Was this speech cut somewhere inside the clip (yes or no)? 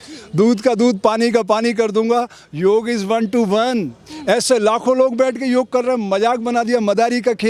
no